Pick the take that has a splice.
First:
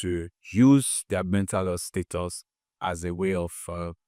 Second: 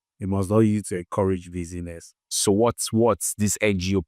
second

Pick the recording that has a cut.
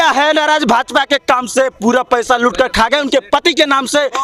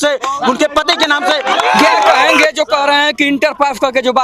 second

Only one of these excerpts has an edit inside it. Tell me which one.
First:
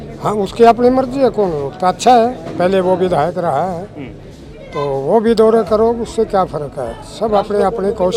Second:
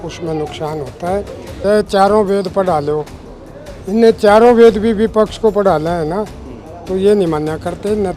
second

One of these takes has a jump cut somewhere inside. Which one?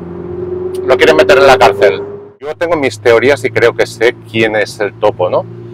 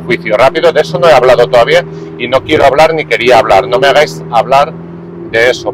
first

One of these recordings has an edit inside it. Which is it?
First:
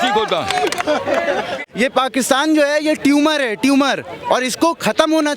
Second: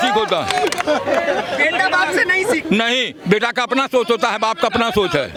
first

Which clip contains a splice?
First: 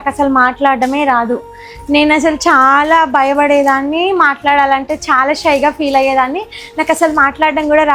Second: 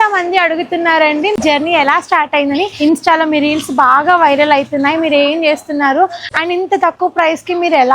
second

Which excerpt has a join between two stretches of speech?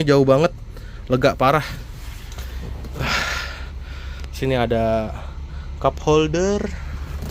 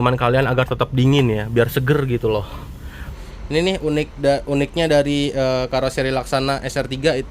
second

